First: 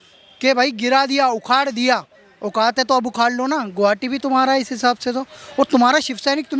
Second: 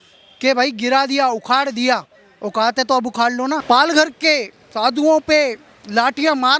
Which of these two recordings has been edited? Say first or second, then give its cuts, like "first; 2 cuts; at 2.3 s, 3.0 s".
second; 1 cut; at 3.6 s